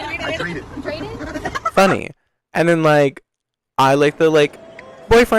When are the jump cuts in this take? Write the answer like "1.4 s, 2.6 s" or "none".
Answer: none